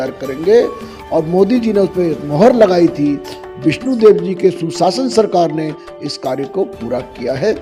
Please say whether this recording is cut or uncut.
uncut